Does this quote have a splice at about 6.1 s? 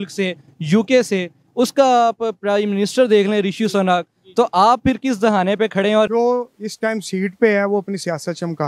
yes; 1 cut; at 6.1 s

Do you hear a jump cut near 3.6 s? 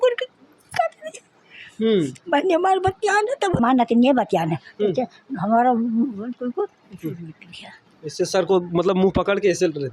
yes; 1 cut; at 3.6 s

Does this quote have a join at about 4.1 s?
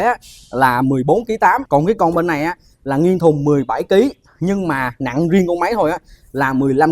no; 1 cut; at 1.6 s

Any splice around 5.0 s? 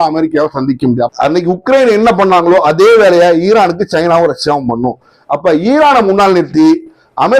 no; 1 cut; at 1.1 s

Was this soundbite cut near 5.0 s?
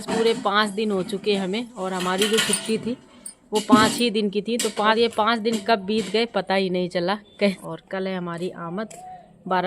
yes; 2 cuts; at 5.0 s, 7.6 s

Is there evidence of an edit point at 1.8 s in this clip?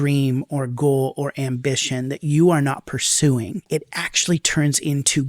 no; 1 cut; at 3.7 s

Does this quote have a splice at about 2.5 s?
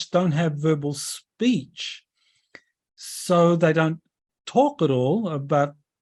no; 0 cuts

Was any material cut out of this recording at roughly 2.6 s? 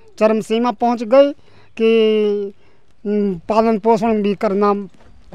no; 0 cuts

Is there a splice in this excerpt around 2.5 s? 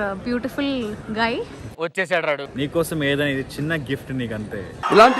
yes; 1 cut; at 2.5 s

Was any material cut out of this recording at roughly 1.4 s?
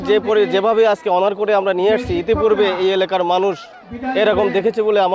no; 0 cuts

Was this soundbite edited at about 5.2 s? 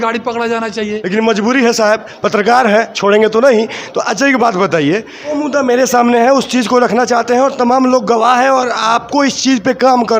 yes; 2 cuts; at 0.9 s, 5.2 s

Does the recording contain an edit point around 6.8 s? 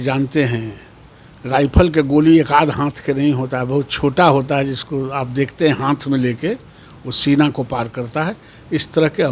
no; 0 cuts

